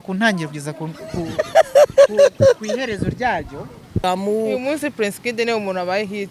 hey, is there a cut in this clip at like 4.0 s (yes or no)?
yes